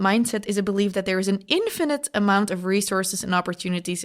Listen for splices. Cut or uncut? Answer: uncut